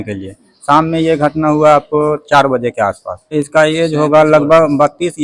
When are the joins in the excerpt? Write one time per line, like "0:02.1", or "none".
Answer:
0:03.3